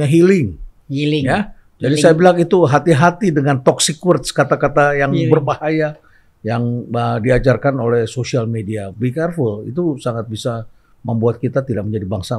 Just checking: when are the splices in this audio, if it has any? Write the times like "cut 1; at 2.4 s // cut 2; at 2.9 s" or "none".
none